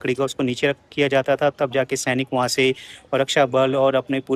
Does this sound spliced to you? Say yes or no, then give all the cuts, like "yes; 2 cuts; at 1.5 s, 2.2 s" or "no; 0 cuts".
no; 0 cuts